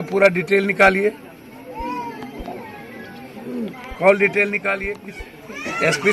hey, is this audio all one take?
no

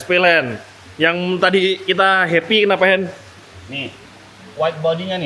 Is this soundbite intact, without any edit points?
yes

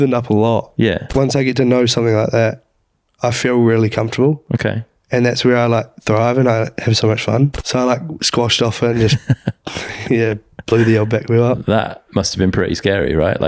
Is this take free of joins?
no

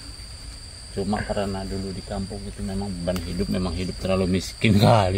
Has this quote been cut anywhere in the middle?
no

